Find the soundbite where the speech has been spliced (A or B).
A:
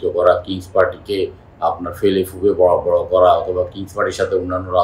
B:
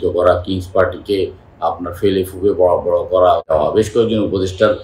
B